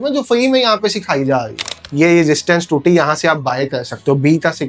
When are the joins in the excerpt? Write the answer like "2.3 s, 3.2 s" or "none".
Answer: 1.8 s

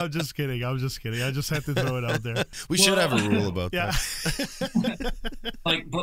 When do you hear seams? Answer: 2.5 s

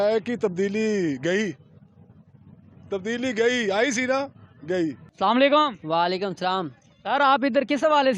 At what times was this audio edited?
none

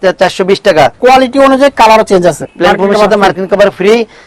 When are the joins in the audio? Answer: 0.9 s, 2.4 s

